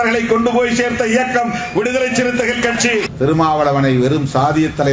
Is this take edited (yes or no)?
yes